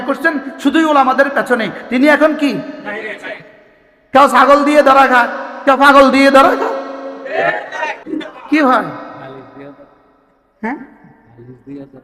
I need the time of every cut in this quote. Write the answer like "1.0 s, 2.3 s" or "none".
8.0 s